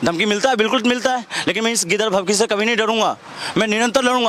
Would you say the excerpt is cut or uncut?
uncut